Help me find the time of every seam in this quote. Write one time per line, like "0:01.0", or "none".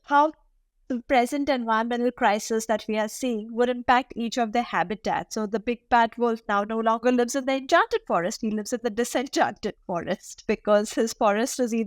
0:10.3